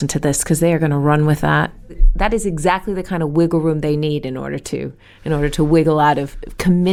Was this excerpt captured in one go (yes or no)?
yes